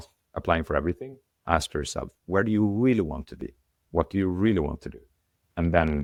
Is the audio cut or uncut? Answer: uncut